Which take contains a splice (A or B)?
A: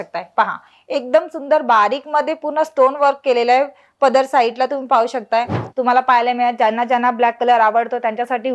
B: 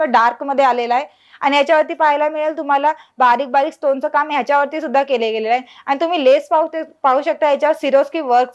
A